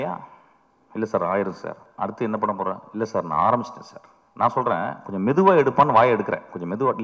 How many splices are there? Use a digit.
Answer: 1